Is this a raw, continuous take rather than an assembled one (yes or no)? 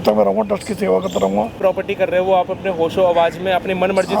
no